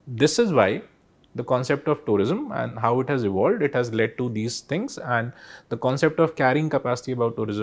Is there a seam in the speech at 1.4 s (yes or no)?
no